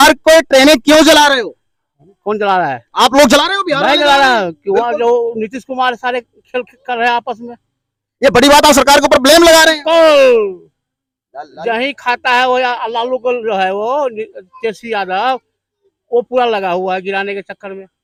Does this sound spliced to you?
no; 0 cuts

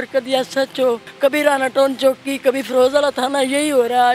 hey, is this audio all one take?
no; 1 cut; at 1.1 s

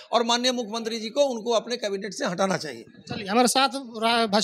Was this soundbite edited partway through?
no; 0 cuts

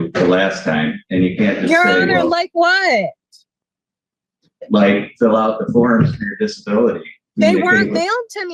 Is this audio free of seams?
yes; 0 cuts

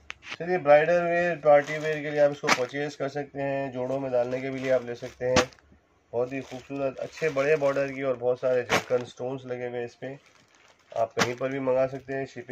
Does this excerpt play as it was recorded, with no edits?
yes; 0 cuts

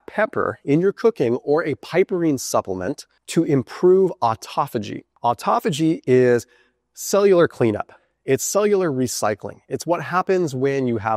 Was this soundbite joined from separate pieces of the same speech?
no; 0 cuts

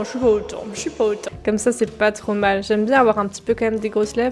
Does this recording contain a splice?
no; 0 cuts

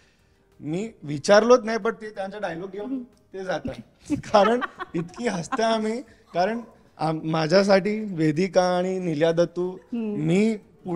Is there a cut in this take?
no; 0 cuts

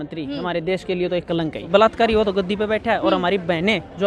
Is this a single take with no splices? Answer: no; 1 cut; at 1.8 s

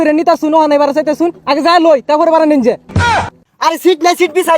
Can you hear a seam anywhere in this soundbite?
yes; 1 cut; at 3.0 s

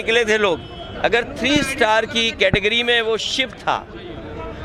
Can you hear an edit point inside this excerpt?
no; 0 cuts

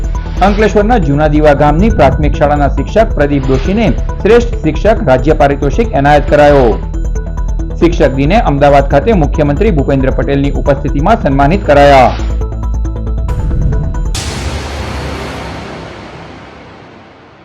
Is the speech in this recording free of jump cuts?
no; 1 cut; at 14.1 s

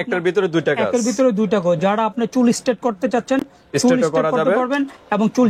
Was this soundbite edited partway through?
no; 0 cuts

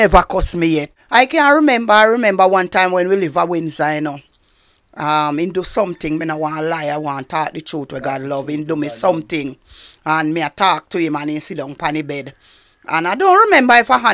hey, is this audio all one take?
no; 1 cut; at 0.9 s

